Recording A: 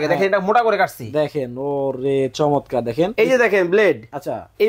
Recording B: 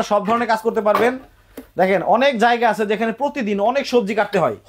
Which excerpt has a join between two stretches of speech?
A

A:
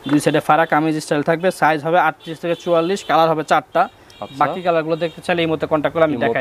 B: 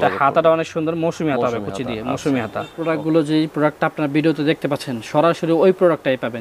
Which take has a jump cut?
B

